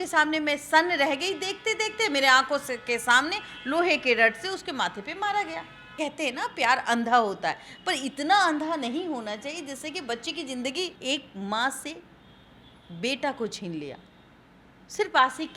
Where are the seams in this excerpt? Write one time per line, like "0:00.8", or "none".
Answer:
0:05.9
0:11.0